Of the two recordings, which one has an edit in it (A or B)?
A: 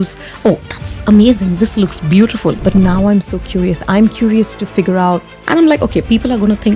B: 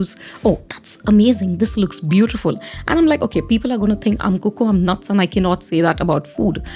A